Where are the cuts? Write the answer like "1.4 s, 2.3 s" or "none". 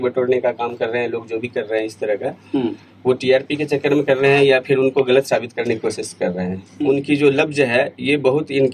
6.7 s